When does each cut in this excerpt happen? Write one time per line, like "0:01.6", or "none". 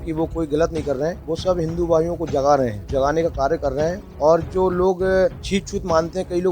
0:01.2
0:02.8
0:05.4